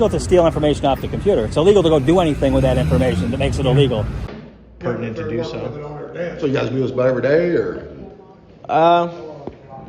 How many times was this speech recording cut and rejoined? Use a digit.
1